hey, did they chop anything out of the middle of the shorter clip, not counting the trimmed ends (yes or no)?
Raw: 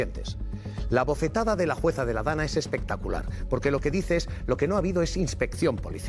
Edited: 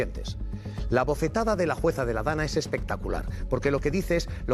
no